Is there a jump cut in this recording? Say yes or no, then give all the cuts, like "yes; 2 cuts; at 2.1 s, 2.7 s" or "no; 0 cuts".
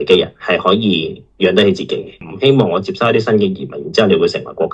yes; 1 cut; at 2.2 s